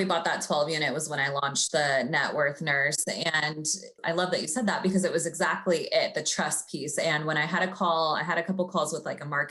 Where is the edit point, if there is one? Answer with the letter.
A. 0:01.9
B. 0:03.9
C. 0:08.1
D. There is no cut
B